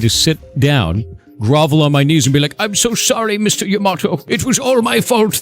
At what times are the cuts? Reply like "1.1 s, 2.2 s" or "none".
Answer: 4.2 s

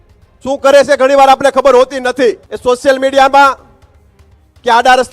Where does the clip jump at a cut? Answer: 2.5 s

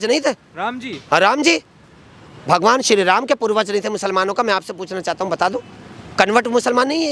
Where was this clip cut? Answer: none

